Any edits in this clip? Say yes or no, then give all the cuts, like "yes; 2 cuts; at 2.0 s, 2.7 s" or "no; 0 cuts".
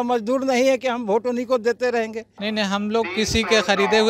yes; 1 cut; at 2.3 s